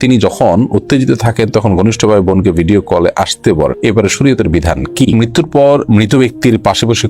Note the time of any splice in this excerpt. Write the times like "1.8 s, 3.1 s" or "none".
5.1 s